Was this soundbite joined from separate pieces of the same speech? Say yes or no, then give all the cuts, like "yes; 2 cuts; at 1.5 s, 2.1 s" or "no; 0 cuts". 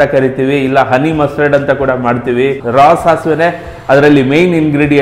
yes; 1 cut; at 2.6 s